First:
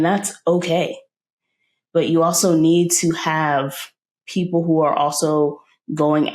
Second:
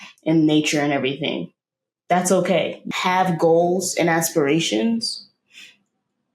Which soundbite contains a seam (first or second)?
second